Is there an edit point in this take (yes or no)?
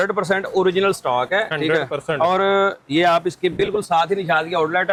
no